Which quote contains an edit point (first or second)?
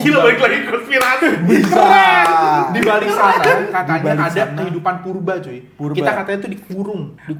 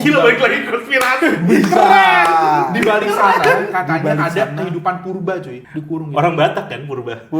second